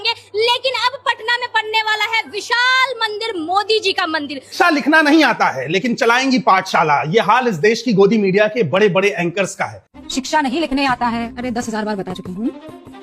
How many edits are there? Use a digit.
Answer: 1